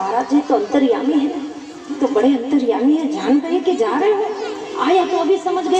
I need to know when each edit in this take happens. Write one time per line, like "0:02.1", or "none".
0:01.9